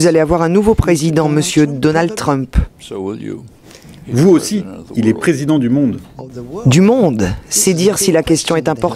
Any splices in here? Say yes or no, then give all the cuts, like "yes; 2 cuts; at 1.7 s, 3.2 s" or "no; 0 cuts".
no; 0 cuts